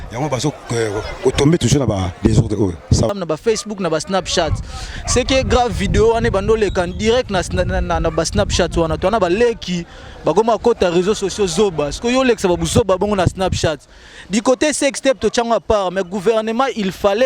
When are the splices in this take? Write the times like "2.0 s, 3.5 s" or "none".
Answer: 3.1 s